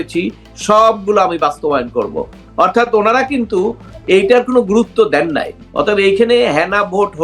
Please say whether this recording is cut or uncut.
cut